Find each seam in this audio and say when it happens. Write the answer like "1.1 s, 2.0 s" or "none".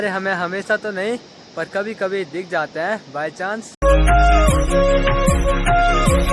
none